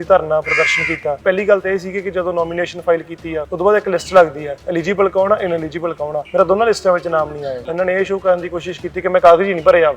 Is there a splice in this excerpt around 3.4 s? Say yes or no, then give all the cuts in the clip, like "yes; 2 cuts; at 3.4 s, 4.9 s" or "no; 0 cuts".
yes; 4 cuts; at 1.2 s, 3.4 s, 6.2 s, 7.6 s